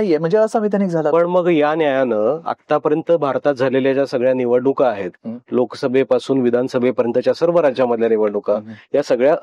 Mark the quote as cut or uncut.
uncut